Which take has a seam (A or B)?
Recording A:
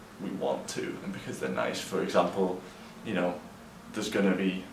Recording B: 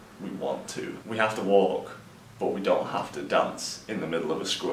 B